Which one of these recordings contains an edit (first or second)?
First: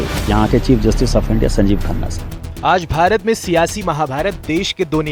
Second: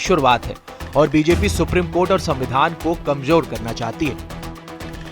second